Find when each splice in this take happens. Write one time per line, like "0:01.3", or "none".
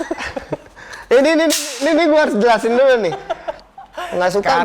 0:03.5